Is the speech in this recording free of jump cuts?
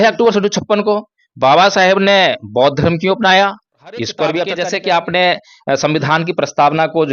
no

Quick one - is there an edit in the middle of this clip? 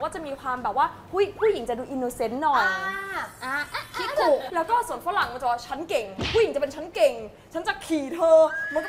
no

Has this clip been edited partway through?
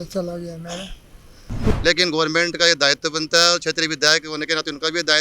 yes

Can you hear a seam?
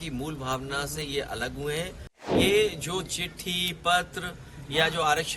yes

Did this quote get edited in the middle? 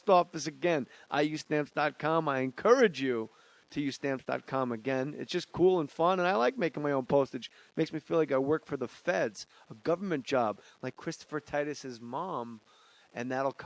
no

